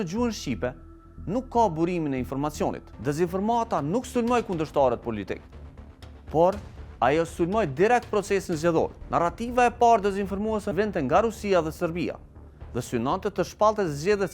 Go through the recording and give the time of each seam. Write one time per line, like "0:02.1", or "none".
0:02.9
0:09.0
0:10.7